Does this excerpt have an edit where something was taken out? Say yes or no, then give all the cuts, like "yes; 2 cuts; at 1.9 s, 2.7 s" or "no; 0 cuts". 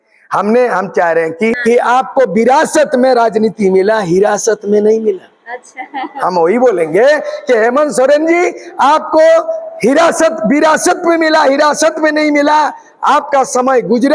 yes; 1 cut; at 1.6 s